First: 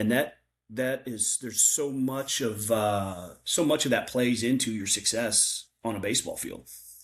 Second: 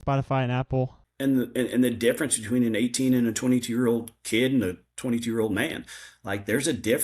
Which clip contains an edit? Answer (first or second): second